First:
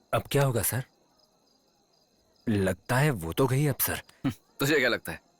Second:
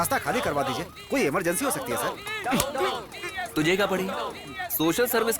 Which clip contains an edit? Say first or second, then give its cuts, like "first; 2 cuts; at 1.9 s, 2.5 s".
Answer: second; 1 cut; at 2.3 s